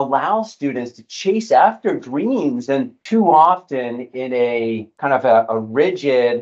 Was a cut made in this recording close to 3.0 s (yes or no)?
yes